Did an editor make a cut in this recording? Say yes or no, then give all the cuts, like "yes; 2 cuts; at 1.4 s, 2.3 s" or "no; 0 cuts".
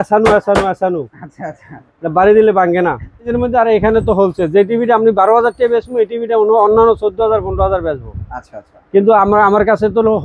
yes; 1 cut; at 3.3 s